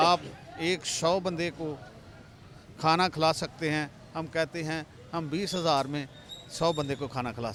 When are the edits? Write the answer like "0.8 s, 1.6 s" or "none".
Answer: none